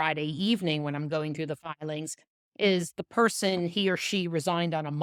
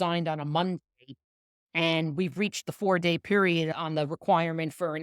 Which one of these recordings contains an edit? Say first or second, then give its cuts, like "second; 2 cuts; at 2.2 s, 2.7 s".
second; 1 cut; at 3.7 s